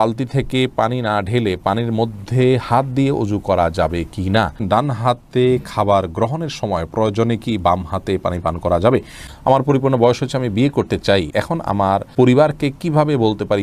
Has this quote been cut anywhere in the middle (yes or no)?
yes